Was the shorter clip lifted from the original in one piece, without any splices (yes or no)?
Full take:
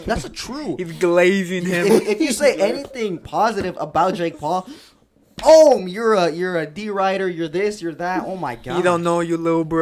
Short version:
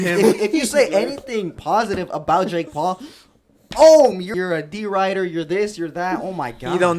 no